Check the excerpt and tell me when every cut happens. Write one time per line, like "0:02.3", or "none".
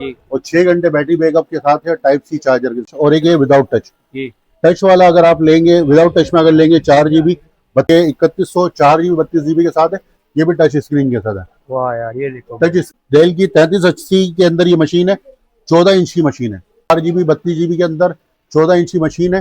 0:02.9
0:07.9
0:12.9
0:16.9

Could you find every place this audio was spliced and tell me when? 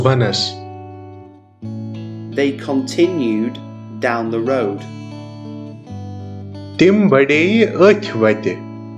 0:00.9
0:02.3
0:04.8
0:06.3

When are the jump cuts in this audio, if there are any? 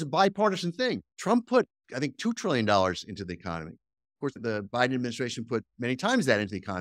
0:01.1
0:01.8
0:04.4

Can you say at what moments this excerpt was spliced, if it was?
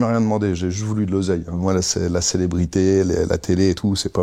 0:01.6

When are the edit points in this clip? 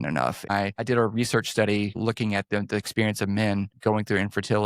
0:00.7
0:02.0
0:03.7

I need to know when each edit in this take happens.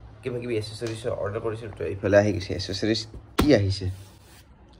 none

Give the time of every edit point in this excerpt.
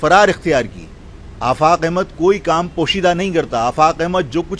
none

